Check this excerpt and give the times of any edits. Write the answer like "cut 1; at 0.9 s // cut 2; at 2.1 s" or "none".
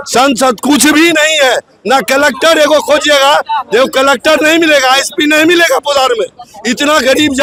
none

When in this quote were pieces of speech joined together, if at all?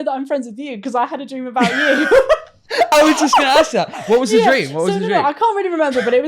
none

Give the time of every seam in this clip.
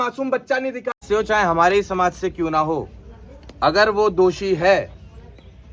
cut 1; at 1.0 s

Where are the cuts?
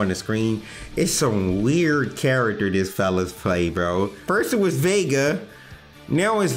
cut 1; at 4.2 s

